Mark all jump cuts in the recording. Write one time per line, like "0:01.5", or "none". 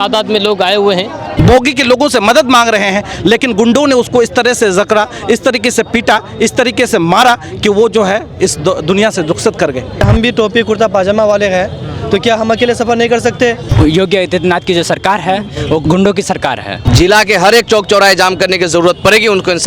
0:01.3
0:10.0
0:13.6
0:15.8
0:16.7